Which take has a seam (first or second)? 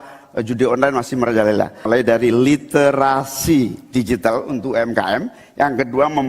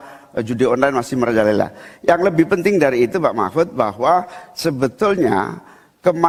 first